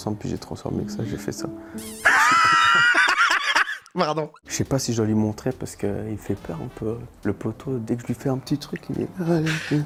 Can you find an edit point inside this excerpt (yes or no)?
no